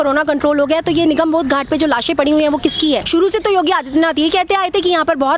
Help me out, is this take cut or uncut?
cut